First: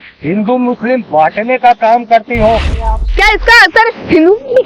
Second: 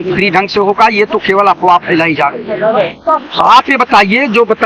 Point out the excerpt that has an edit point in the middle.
first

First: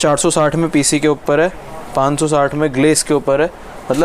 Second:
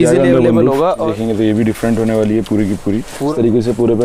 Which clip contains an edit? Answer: second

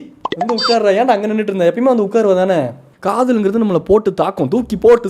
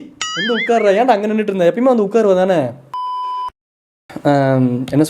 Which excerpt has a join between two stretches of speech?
first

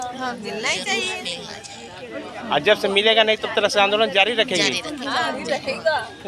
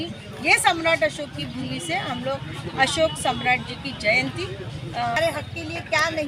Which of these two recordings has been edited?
second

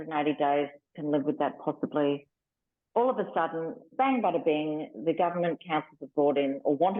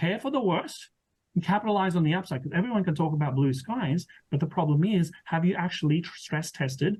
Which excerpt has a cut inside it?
first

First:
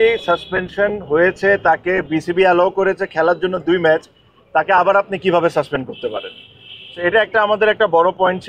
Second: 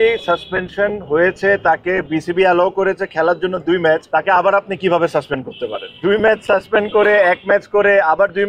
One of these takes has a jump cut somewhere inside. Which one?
second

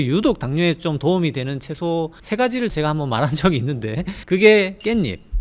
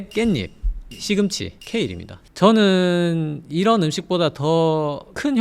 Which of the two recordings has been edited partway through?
second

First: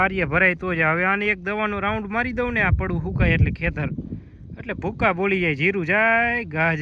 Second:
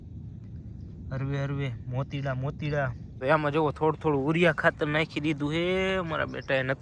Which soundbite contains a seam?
second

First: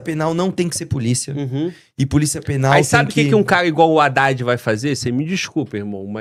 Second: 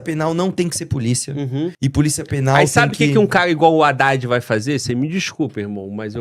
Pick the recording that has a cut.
second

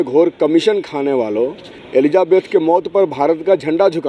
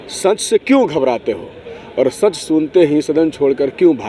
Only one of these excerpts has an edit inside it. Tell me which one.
first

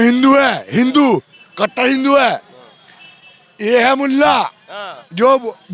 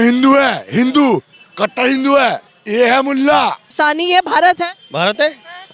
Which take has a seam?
second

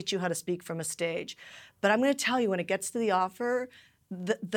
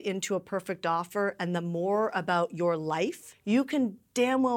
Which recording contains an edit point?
second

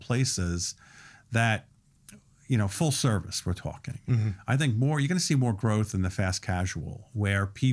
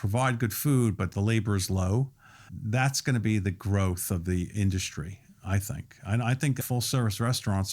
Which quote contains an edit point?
second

